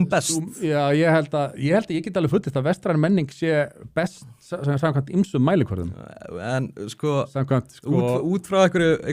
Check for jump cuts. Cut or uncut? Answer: uncut